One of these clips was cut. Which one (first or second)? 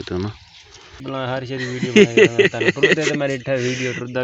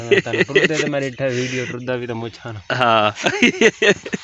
first